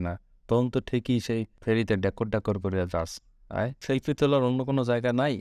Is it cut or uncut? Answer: cut